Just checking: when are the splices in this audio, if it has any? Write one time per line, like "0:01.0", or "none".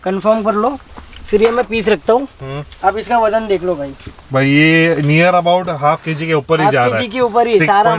none

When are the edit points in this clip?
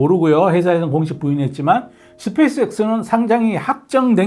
none

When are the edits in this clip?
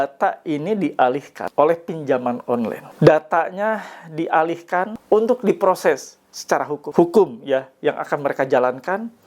0:01.4
0:02.8
0:04.9
0:06.8

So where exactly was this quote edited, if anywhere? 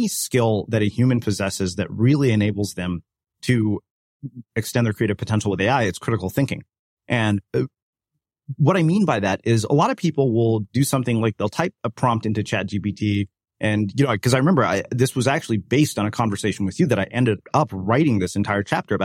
none

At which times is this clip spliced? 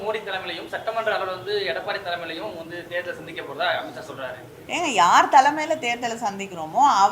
0:04.5

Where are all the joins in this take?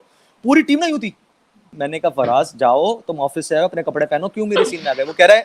0:01.7

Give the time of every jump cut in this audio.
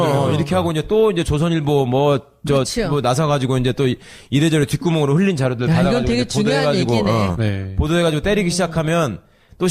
0:06.9

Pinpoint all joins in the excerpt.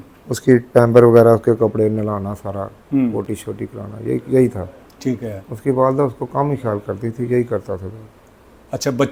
none

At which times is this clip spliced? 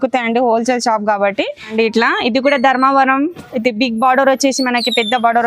0:01.7

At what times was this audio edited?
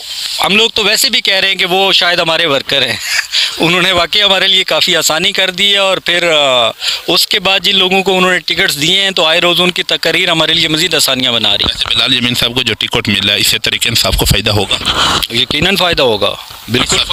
none

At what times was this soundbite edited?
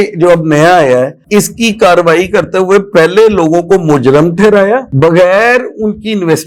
none

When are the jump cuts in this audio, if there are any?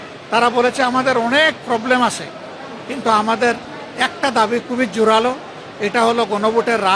none

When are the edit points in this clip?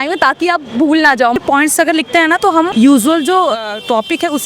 0:01.4
0:02.7

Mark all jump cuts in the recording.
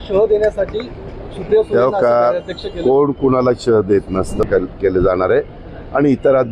0:04.4

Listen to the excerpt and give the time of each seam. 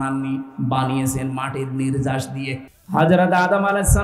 0:02.7

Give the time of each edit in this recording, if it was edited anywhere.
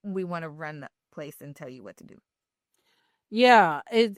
none

